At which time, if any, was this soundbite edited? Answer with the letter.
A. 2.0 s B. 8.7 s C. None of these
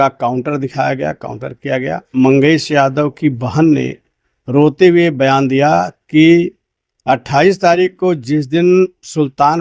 A